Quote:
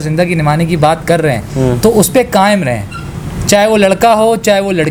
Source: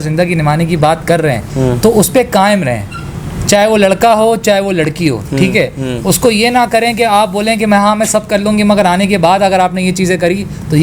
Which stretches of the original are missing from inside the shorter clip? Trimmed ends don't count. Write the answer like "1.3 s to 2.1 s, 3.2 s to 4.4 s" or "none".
none

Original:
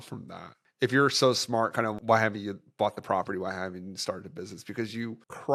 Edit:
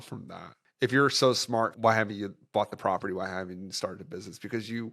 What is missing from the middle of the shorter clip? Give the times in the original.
1.7 s to 2.0 s

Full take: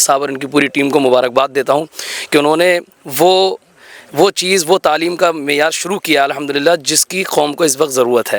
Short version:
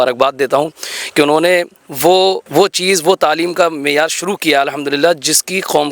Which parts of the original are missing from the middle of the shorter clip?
3.6 s to 4.1 s

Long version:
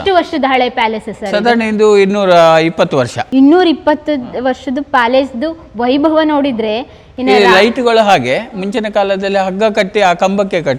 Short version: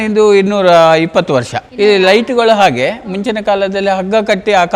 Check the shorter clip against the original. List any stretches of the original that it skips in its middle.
3.2 s to 7.0 s

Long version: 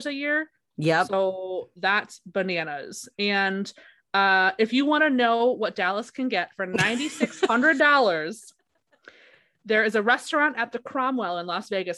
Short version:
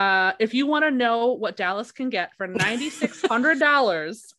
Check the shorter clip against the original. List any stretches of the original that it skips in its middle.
none

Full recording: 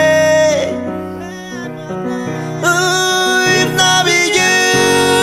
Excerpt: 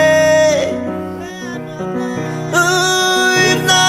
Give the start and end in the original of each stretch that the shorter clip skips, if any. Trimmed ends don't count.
1.3 s to 1.4 s

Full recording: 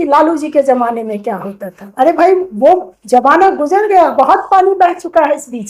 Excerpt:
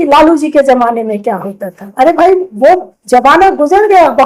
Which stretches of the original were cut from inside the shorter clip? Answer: none

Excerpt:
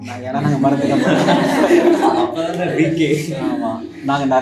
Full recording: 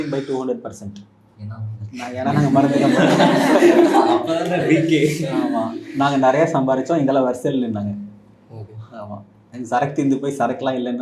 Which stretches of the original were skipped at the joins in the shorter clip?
none

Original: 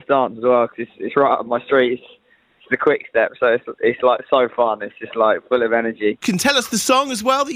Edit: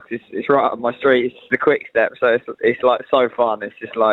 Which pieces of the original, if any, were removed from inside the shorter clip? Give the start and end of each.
2.1 s to 2.6 s

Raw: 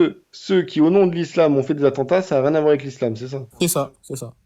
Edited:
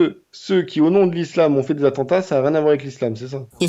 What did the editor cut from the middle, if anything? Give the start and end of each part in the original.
none

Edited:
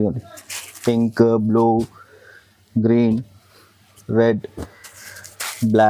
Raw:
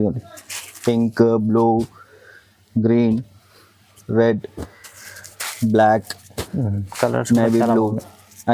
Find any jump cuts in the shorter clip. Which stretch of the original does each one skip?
none

